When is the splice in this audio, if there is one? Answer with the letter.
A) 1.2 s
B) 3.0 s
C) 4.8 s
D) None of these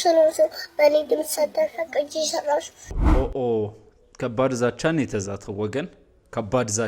B